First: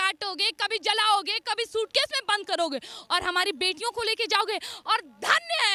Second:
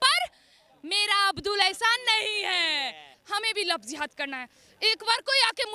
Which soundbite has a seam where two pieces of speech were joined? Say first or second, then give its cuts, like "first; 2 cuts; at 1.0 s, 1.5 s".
second; 1 cut; at 3.1 s